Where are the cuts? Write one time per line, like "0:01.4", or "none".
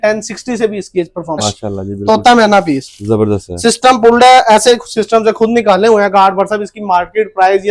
0:01.4